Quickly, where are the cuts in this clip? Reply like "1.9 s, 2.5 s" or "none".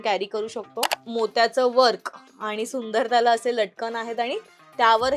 1.0 s